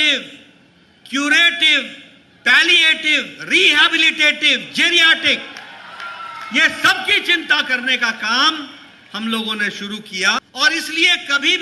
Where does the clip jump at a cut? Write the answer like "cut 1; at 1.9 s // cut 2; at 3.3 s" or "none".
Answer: cut 1; at 10.4 s

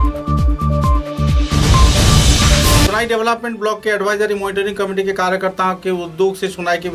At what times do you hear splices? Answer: none

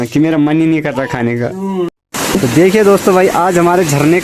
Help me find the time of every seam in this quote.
cut 1; at 2.0 s

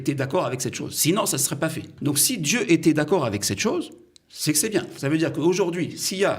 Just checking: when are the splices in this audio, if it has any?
cut 1; at 1.9 s // cut 2; at 4.9 s

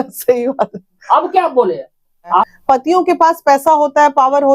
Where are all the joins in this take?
cut 1; at 2.5 s

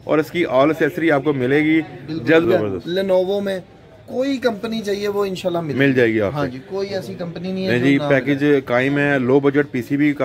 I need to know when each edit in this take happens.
cut 1; at 2.4 s

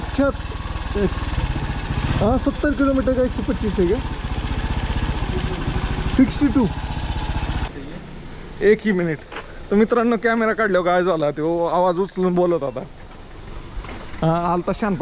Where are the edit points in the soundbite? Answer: cut 1; at 7.7 s

